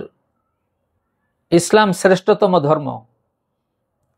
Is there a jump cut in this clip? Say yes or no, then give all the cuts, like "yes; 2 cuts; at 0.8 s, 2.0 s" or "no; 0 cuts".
no; 0 cuts